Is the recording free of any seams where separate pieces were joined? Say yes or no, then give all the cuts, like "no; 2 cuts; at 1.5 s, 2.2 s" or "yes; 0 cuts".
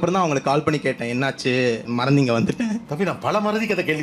yes; 0 cuts